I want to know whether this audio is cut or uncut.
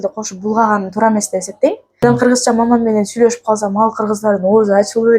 cut